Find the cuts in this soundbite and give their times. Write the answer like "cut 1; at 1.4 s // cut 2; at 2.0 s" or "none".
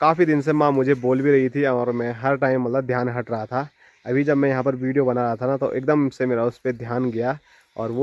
none